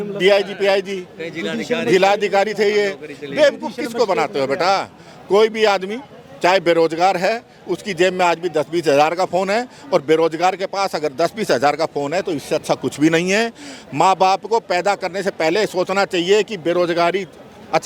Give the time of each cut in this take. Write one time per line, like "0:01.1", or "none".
none